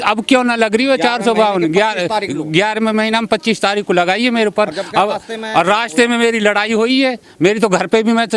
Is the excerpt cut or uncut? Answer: uncut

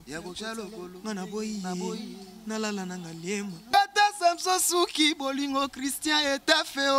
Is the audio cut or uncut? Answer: cut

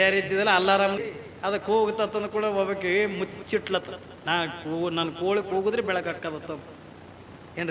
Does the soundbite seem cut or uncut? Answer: cut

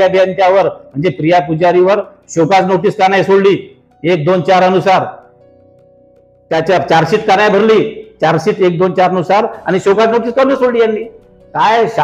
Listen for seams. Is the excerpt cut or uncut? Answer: uncut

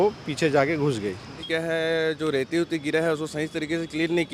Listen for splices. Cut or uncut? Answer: cut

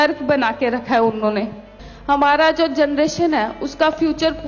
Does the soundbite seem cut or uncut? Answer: cut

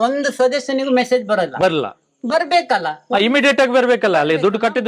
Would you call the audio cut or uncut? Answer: uncut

